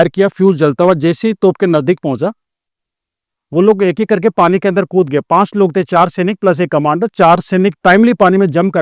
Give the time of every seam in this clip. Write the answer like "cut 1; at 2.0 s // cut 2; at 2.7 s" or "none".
none